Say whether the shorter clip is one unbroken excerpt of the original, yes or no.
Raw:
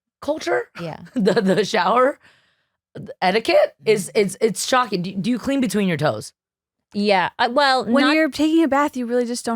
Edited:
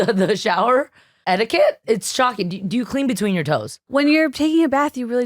no